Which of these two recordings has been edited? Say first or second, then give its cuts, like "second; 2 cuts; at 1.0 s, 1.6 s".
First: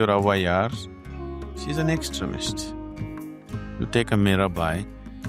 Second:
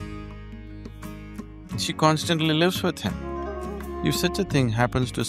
second; 2 cuts; at 0.7 s, 1.8 s